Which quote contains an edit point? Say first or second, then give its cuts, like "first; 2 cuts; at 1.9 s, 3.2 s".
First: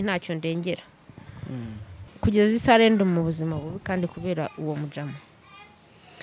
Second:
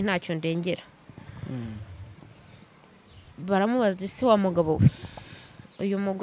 first; 1 cut; at 2.0 s